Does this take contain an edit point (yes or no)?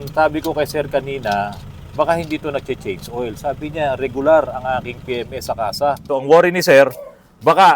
yes